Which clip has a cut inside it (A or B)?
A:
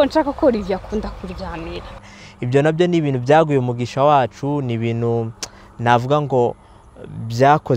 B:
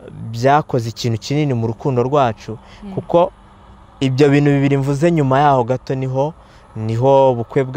A